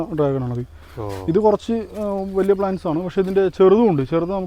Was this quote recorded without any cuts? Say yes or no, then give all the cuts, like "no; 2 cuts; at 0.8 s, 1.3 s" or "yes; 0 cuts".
yes; 0 cuts